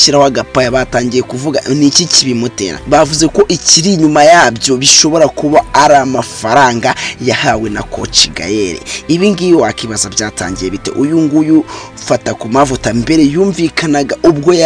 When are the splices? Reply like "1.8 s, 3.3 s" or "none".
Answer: 2.7 s